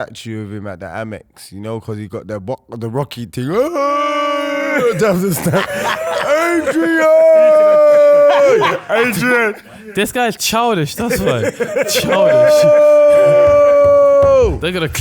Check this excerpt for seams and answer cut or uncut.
cut